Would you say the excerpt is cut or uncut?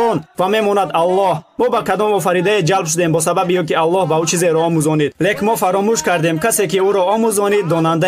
uncut